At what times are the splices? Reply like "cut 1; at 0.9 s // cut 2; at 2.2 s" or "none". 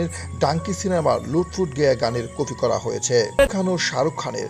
cut 1; at 3.5 s